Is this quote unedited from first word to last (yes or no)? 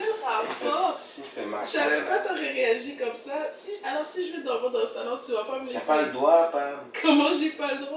yes